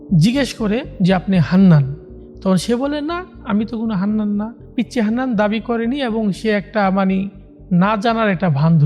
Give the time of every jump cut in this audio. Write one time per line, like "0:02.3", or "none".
0:00.9
0:03.3
0:04.6